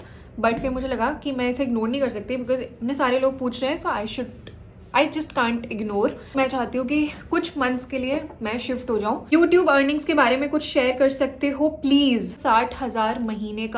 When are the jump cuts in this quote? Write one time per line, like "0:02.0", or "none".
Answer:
0:06.3
0:09.3
0:12.3